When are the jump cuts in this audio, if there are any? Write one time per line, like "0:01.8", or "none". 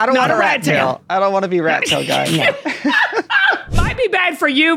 0:03.8